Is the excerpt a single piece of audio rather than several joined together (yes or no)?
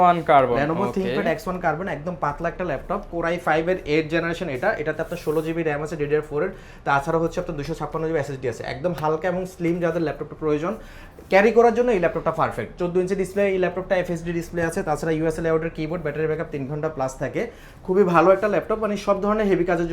yes